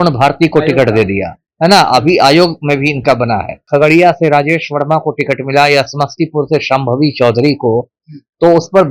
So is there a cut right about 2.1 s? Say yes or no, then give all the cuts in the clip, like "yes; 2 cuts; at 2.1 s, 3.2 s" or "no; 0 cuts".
no; 1 cut; at 3.6 s